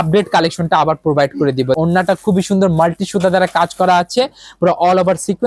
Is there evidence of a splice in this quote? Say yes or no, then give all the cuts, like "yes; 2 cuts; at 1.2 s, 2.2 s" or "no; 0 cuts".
yes; 1 cut; at 1.8 s